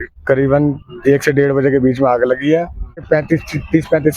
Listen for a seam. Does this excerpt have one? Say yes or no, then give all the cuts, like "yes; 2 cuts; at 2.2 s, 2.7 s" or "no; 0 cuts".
yes; 1 cut; at 3.1 s